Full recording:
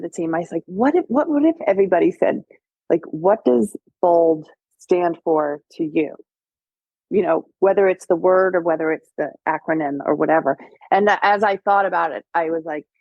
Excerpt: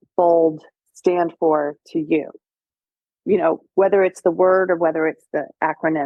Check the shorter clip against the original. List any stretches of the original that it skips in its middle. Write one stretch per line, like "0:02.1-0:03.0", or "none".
none